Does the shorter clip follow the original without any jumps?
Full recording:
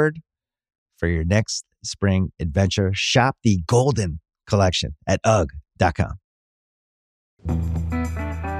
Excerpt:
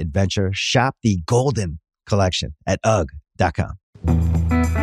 no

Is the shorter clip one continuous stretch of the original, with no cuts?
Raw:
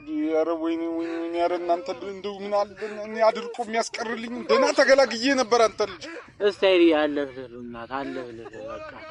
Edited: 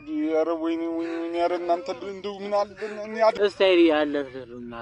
no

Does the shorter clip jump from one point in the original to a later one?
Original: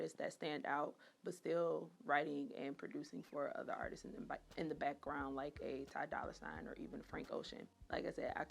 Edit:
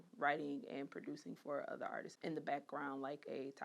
yes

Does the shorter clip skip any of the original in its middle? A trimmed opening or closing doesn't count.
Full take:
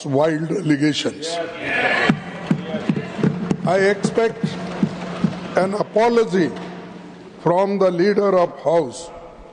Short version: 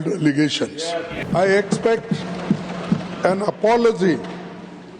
yes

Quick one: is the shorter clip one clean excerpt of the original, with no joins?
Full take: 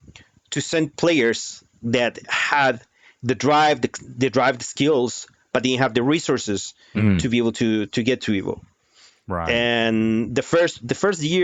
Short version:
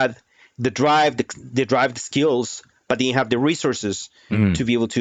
yes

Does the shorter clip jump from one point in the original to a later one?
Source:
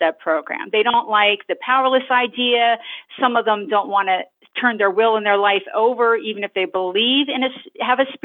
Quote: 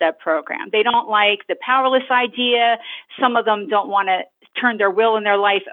no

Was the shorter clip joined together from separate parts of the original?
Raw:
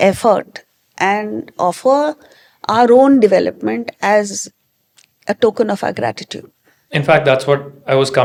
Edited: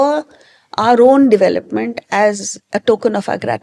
yes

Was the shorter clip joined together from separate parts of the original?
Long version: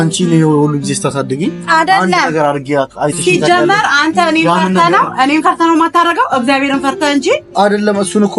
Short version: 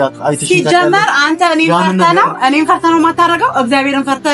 no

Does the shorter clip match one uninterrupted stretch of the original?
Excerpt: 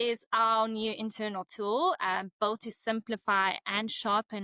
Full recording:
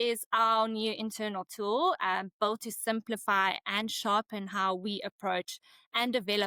yes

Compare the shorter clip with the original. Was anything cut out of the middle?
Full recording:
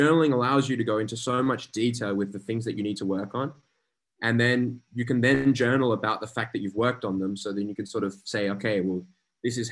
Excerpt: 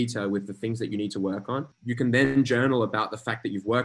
yes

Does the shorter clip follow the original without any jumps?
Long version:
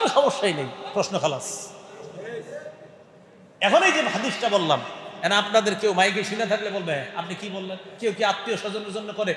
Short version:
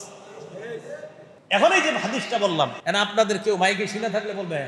no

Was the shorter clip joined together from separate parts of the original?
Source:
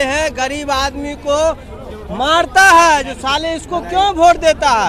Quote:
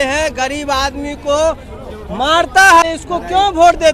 yes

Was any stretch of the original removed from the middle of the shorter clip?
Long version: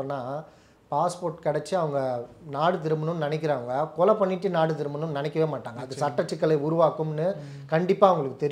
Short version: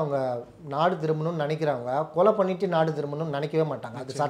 no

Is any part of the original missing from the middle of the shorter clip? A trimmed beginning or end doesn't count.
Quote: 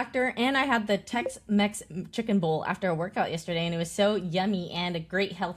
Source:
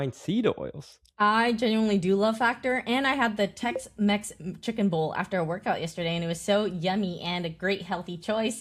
no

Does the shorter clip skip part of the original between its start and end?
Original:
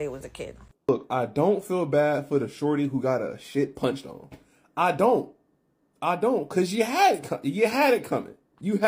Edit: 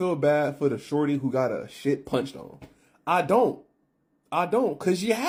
no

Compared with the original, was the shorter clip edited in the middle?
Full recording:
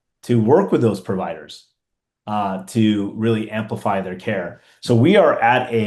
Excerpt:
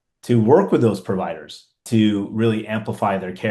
yes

